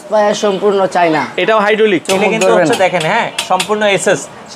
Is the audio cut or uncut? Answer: cut